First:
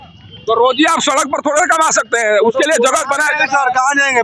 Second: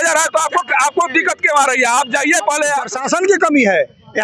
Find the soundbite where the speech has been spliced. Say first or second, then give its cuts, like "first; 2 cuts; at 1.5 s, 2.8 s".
second; 1 cut; at 2.9 s